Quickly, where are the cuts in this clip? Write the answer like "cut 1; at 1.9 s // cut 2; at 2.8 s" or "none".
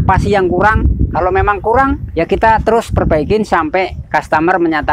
none